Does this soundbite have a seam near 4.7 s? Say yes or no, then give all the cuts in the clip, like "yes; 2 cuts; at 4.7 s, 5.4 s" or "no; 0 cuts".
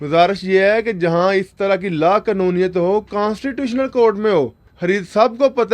yes; 1 cut; at 4.7 s